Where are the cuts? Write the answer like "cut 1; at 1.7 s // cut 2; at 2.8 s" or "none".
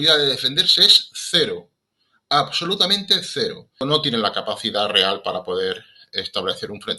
cut 1; at 3.8 s